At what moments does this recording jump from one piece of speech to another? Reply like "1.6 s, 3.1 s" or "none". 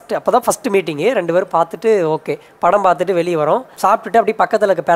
3.7 s